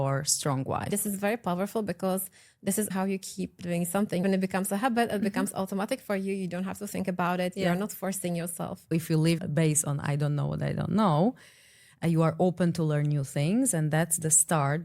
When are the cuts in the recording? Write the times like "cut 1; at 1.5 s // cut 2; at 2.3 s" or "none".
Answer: cut 1; at 0.9 s // cut 2; at 8.8 s